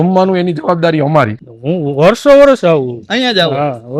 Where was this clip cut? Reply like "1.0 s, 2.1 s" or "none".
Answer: 1.4 s